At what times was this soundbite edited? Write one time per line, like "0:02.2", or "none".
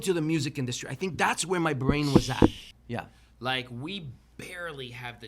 0:02.7